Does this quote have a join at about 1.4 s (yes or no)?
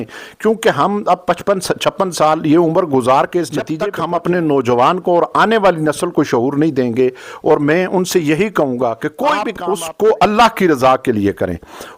no